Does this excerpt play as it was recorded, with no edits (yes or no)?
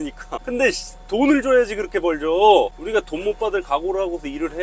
no